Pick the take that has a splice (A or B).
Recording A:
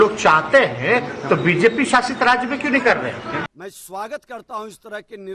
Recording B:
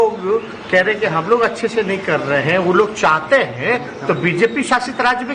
A